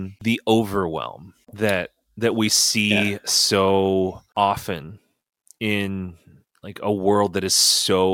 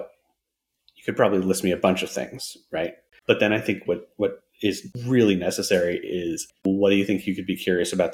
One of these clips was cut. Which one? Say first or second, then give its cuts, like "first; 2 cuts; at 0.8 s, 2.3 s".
second; 2 cuts; at 3.1 s, 6.5 s